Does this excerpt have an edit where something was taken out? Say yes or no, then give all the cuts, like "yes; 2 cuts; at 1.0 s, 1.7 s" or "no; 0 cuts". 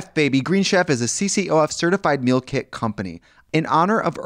yes; 1 cut; at 3.3 s